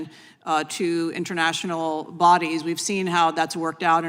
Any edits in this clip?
no; 0 cuts

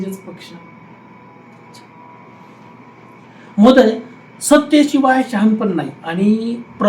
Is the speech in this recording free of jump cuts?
yes; 0 cuts

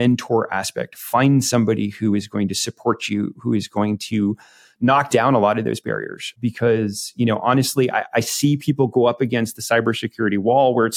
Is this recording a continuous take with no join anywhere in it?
no; 1 cut; at 6.4 s

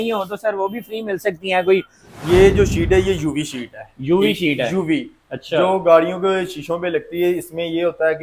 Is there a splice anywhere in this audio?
yes; 1 cut; at 2.0 s

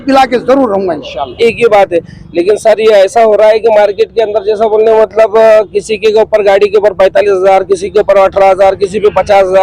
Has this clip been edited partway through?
yes; 1 cut; at 1.3 s

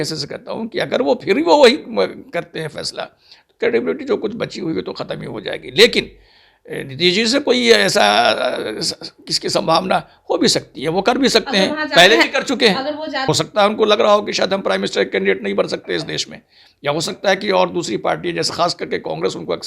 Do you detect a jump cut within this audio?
yes; 1 cut; at 13.2 s

